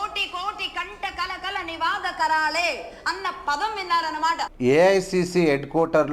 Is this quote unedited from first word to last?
no; 1 cut; at 4.5 s

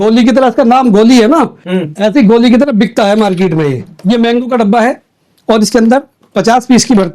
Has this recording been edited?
yes; 1 cut; at 3.8 s

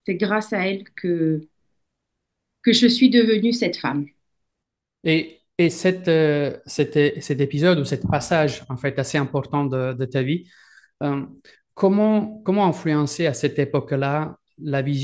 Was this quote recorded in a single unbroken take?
yes; 0 cuts

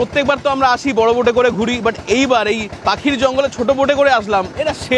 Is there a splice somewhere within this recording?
no; 0 cuts

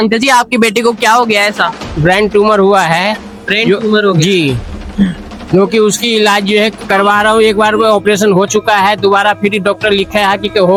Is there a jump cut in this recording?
no; 0 cuts

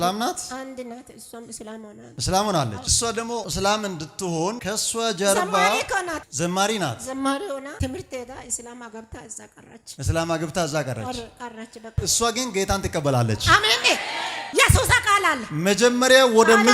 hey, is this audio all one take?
yes; 0 cuts

